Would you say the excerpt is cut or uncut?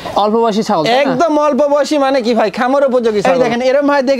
cut